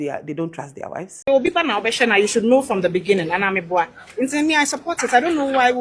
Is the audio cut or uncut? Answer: cut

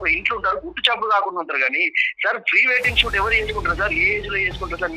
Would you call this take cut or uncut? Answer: uncut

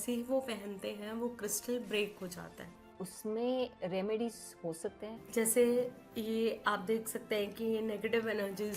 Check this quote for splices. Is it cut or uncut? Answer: cut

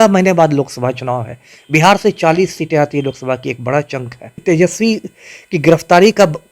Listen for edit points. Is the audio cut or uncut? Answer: cut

